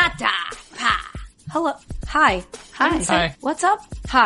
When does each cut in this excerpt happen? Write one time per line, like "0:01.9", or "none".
0:03.3